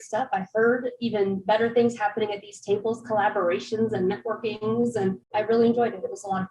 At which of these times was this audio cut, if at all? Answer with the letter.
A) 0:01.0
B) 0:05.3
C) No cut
B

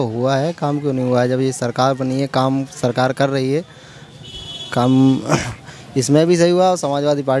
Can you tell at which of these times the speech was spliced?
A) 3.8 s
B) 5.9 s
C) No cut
C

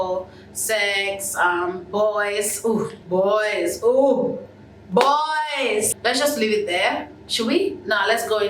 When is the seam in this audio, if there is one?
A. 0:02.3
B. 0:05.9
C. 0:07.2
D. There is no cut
B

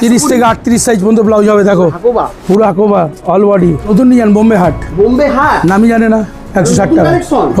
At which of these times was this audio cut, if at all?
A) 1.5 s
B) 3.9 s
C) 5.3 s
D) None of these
B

